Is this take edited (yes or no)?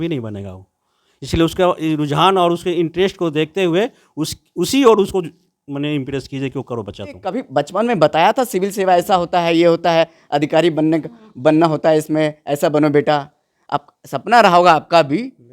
yes